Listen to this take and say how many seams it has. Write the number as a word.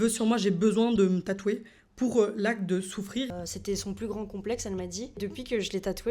two